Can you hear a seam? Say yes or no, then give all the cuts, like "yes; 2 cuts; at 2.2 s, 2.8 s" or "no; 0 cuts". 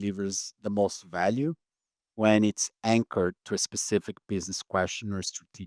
no; 0 cuts